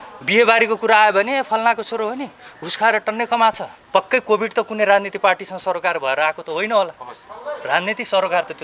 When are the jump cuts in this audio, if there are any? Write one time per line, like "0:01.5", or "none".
0:03.7